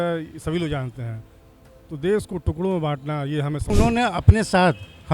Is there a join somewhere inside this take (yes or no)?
yes